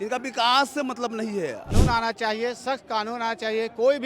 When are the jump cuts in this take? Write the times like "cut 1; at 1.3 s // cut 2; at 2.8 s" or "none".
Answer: cut 1; at 1.7 s